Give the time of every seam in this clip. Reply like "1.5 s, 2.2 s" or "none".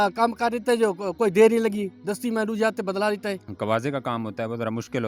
3.4 s